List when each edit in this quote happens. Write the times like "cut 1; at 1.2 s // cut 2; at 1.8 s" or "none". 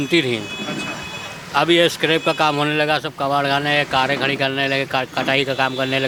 none